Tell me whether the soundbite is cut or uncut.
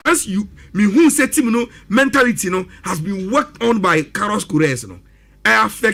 uncut